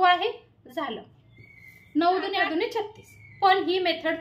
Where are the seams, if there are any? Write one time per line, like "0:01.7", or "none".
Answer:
0:02.3

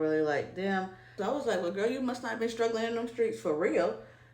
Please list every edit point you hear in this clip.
0:01.2

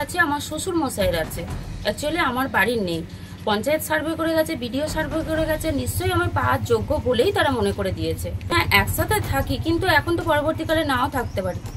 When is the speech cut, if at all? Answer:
0:08.4

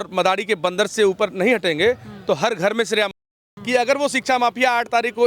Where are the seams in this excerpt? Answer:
0:03.5

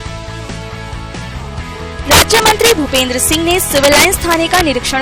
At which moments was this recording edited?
0:01.2

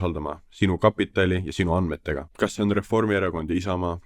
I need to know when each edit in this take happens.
0:02.3

